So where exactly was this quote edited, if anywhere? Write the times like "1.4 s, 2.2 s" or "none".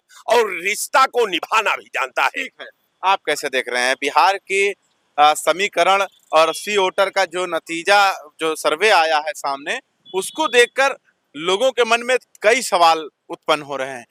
none